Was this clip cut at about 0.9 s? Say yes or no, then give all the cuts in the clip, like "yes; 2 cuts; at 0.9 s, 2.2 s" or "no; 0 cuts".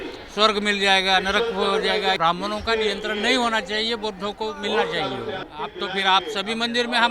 no; 2 cuts; at 2.2 s, 5.5 s